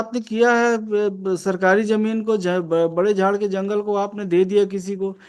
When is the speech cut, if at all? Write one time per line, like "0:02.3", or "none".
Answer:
none

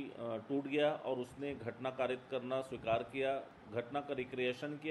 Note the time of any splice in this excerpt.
none

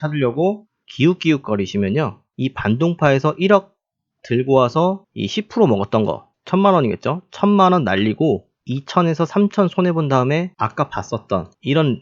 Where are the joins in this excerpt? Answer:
0:10.6

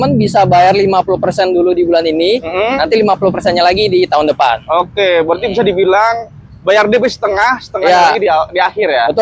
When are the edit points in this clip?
none

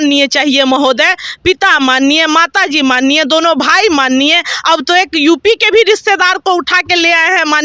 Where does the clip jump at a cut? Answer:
none

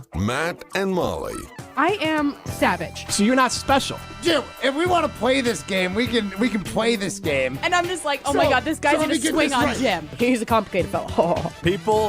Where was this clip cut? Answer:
none

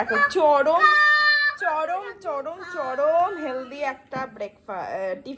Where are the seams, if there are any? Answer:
none

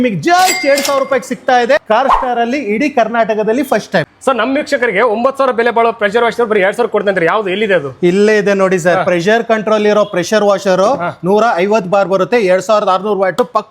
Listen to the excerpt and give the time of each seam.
0:01.8
0:04.1

